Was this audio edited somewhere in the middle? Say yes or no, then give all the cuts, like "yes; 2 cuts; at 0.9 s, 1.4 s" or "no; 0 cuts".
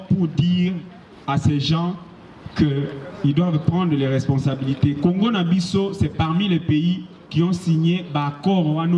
no; 0 cuts